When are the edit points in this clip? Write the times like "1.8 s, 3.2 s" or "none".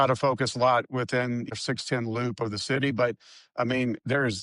1.5 s